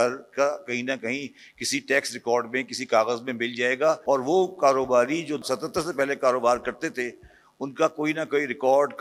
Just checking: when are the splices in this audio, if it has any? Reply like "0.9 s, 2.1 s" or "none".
4.0 s, 5.4 s